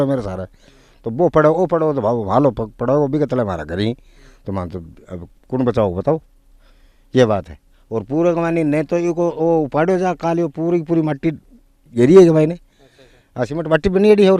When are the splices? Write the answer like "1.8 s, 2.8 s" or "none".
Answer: none

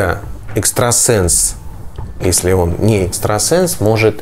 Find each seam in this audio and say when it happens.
none

